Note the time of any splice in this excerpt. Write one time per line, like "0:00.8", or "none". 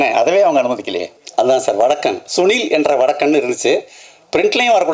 0:01.2